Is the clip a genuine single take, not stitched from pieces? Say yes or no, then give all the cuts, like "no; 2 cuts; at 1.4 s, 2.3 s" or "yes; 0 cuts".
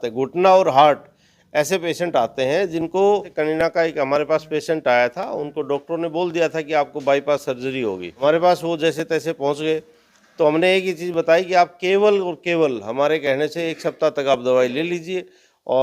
no; 2 cuts; at 3.6 s, 8.1 s